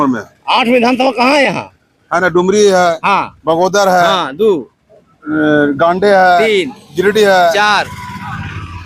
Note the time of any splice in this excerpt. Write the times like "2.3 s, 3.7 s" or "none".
none